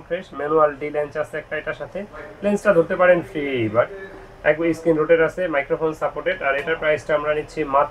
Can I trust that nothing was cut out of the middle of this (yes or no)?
yes